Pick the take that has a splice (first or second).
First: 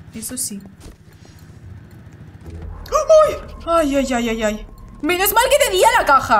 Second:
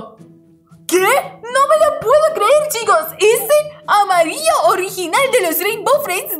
second